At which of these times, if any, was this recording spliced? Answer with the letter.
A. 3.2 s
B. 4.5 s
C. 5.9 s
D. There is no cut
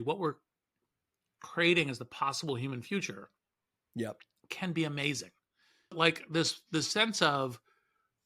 C